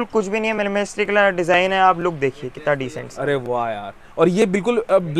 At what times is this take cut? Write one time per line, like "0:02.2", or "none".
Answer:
none

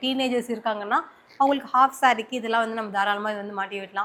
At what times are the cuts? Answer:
none

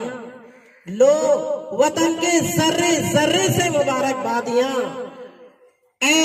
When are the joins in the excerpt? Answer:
none

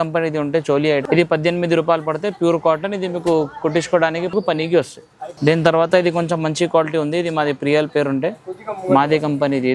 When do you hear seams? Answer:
none

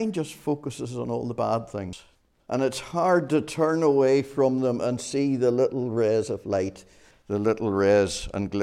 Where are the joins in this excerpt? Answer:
0:02.0

